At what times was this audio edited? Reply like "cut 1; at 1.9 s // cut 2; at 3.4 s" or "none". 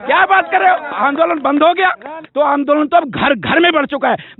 cut 1; at 2.2 s